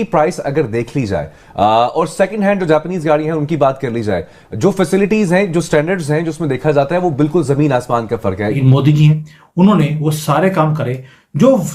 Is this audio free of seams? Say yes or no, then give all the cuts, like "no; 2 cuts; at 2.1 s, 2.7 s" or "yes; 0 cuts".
no; 1 cut; at 8.6 s